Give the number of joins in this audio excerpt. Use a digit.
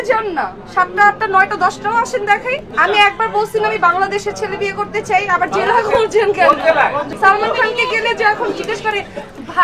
2